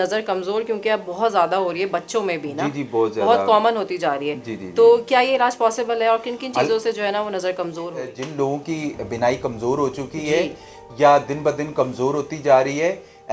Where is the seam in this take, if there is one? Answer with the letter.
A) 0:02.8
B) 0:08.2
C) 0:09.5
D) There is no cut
B